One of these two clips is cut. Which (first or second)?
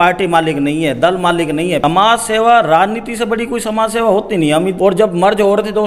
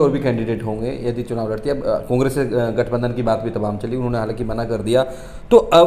first